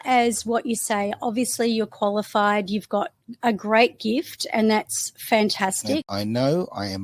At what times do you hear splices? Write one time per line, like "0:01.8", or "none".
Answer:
0:06.1